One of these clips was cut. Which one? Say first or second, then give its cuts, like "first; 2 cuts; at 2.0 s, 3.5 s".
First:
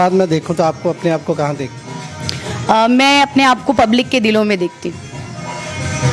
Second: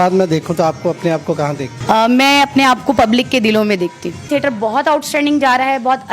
second; 2 cuts; at 1.7 s, 4.3 s